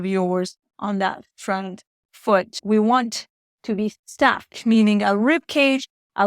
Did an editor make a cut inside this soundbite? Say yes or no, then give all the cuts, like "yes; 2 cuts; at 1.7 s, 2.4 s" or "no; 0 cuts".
yes; 1 cut; at 2.6 s